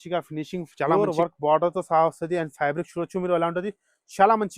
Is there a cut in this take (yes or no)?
yes